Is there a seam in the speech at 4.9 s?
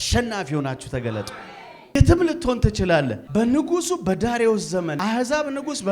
yes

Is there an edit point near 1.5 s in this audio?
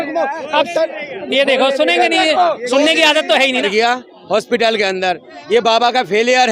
no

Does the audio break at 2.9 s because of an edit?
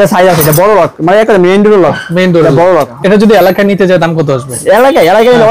yes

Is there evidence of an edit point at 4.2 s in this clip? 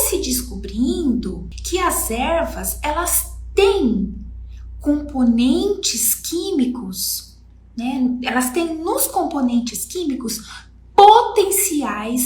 no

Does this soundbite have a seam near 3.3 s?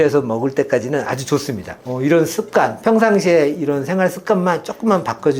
no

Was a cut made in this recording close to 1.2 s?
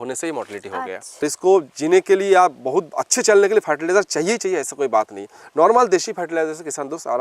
yes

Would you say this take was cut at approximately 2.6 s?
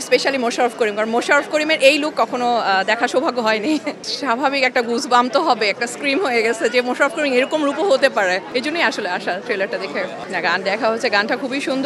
no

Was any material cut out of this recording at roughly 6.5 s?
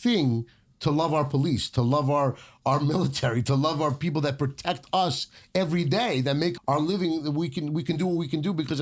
yes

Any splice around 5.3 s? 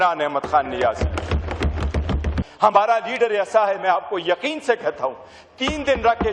no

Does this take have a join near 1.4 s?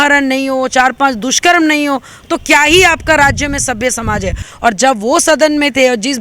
no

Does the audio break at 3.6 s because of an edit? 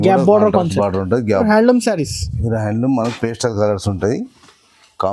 no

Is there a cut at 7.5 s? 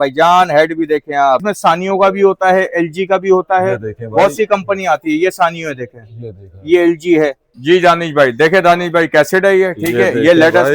yes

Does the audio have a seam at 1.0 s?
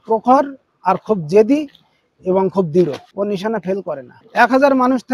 no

